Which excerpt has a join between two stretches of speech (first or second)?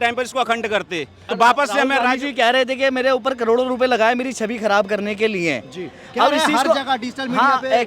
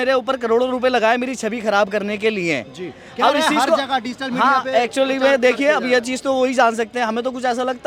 first